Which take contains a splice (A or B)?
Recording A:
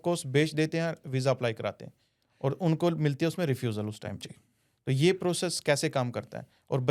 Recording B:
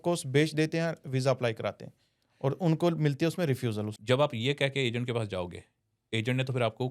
B